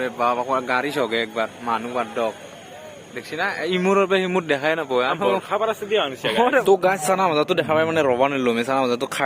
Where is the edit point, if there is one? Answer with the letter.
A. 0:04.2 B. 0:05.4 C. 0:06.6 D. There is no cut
C